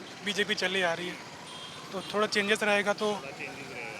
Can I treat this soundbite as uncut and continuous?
yes; 0 cuts

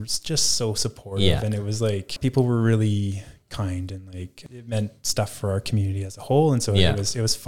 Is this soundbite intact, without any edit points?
no; 2 cuts; at 2.1 s, 4.4 s

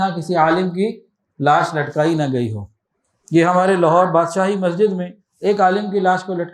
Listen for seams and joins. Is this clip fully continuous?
yes; 0 cuts

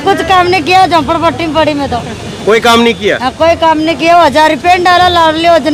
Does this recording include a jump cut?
no; 0 cuts

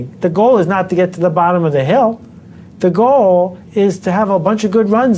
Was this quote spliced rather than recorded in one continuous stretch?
no; 0 cuts

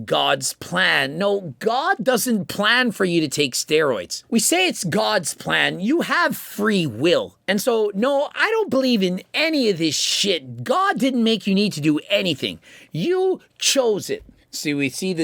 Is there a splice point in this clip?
no; 0 cuts

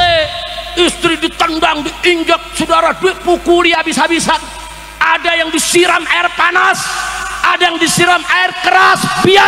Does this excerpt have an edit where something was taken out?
no; 0 cuts

